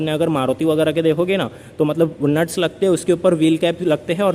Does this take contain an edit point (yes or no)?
no